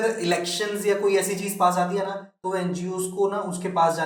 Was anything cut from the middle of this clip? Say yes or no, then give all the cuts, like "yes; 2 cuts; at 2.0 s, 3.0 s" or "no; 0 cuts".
no; 0 cuts